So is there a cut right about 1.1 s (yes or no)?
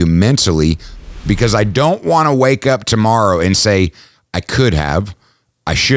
yes